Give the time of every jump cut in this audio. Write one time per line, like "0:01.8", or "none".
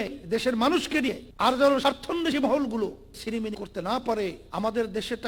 0:01.3
0:03.2
0:04.4